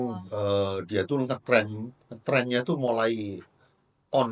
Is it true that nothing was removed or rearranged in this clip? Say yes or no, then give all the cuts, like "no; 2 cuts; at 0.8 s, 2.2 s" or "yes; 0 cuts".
yes; 0 cuts